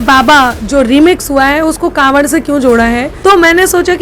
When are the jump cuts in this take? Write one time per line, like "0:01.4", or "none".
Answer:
0:03.1